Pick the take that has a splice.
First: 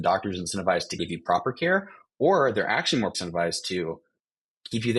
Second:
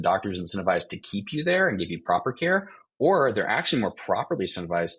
first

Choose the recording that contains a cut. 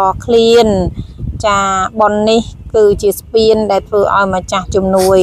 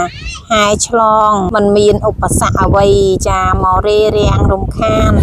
second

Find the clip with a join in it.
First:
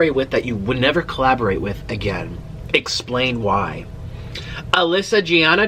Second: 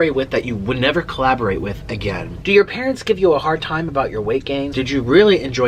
second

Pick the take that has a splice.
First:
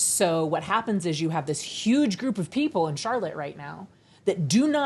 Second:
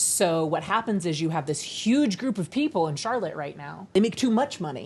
second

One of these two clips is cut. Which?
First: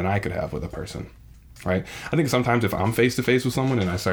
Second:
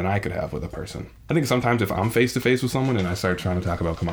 second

